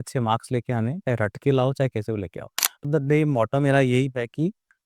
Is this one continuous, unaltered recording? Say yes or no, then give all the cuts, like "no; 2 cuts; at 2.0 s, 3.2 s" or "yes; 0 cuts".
no; 1 cut; at 2.8 s